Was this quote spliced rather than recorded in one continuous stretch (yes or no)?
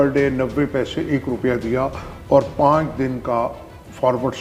no